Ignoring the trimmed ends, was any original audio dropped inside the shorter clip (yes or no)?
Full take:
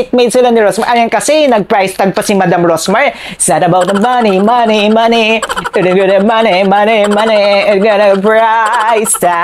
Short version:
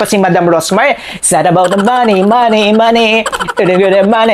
no